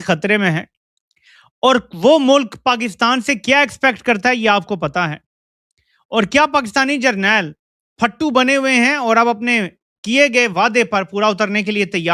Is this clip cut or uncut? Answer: uncut